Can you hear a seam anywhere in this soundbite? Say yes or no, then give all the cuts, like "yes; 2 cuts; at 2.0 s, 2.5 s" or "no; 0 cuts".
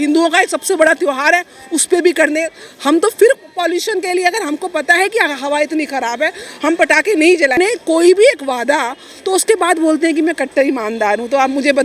yes; 1 cut; at 7.5 s